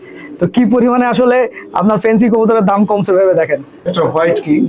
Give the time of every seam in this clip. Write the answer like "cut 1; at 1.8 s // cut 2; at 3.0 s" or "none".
none